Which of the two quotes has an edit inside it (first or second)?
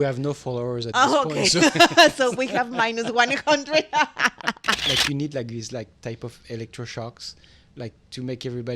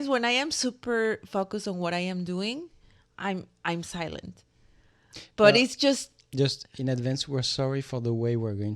first